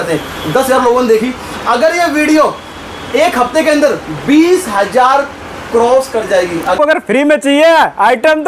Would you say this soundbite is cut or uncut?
cut